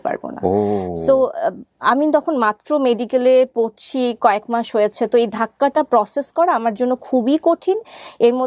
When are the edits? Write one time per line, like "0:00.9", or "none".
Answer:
none